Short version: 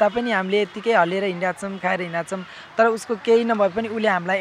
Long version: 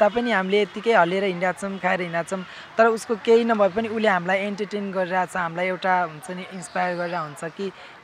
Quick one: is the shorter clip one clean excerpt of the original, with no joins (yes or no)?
yes